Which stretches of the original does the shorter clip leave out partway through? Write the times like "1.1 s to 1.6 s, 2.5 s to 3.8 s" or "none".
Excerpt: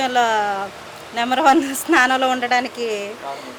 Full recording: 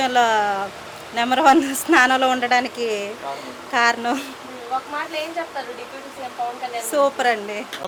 none